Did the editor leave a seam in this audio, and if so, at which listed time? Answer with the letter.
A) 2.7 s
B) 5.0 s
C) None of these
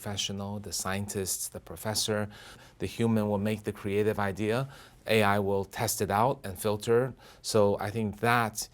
A